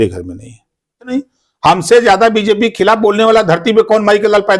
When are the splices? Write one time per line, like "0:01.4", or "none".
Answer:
0:01.1